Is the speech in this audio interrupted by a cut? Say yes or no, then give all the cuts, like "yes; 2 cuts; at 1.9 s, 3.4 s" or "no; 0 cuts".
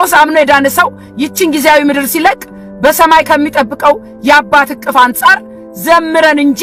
no; 0 cuts